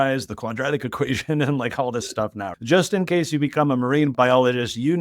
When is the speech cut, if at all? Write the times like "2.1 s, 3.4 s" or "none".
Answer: 2.5 s, 4.1 s